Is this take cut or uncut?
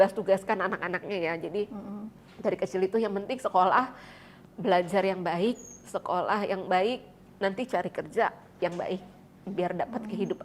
uncut